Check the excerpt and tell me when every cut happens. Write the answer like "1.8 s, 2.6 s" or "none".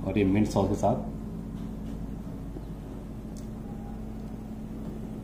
none